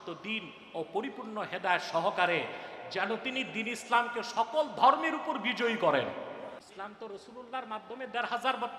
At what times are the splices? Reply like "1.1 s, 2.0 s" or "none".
6.6 s